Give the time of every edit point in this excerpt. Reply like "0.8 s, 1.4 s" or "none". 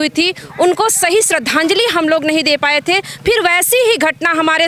none